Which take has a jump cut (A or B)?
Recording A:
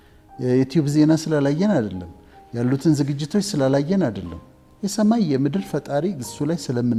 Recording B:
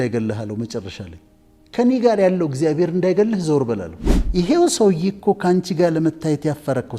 B